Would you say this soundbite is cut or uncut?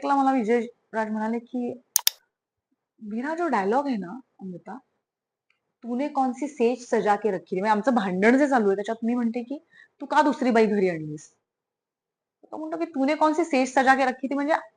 uncut